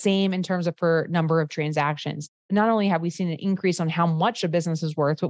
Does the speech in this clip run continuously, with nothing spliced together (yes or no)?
no